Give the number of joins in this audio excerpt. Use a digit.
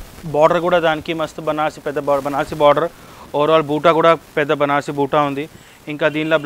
0